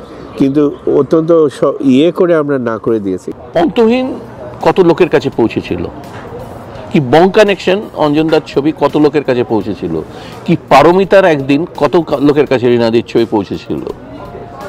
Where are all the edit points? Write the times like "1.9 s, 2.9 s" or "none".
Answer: 3.3 s